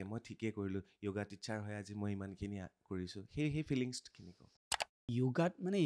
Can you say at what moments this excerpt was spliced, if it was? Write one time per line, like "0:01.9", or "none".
0:04.9

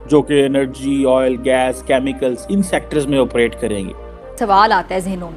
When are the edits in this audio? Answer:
0:04.3

